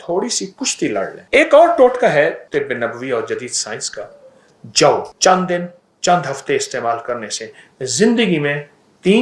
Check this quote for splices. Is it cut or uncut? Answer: cut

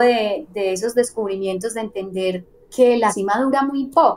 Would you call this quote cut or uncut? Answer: cut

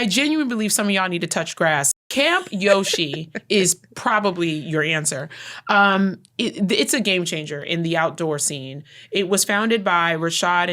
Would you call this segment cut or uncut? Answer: cut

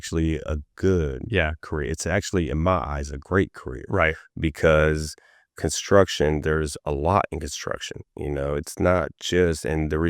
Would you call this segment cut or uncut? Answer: uncut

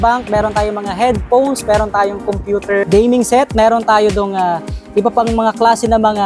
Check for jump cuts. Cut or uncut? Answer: cut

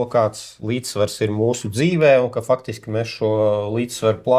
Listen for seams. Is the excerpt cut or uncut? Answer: uncut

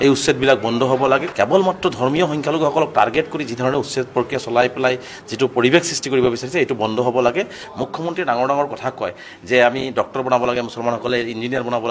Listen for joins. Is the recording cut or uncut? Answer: cut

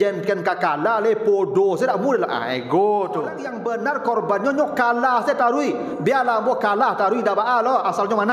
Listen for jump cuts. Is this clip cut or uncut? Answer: cut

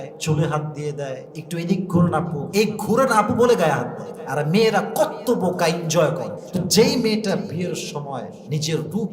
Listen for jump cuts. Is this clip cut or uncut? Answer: cut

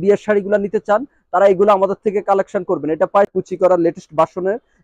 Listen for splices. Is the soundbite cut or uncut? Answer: cut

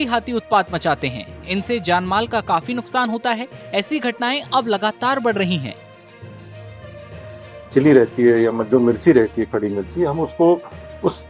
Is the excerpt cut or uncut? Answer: cut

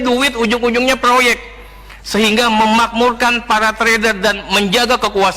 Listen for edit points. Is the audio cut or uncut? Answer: uncut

